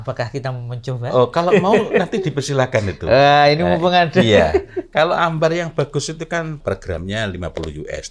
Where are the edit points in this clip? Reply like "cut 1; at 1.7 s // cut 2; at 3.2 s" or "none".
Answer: cut 1; at 6.6 s